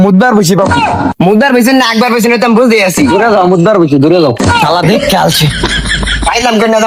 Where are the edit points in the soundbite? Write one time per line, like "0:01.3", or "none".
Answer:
none